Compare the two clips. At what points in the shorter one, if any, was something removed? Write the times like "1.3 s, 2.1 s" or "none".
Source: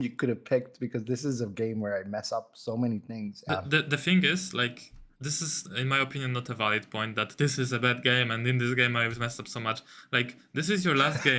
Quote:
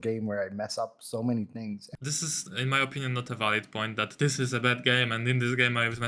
1.8 s